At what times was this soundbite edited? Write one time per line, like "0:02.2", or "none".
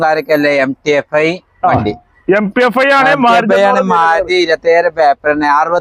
none